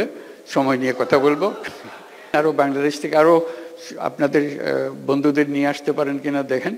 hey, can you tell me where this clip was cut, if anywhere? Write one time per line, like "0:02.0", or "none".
0:02.3